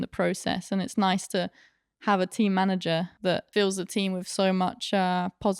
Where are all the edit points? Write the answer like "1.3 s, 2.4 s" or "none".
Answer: 3.4 s